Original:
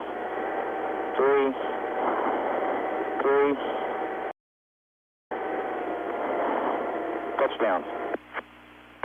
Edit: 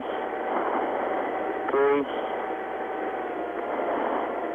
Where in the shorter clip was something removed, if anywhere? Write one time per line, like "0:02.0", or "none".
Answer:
0:02.8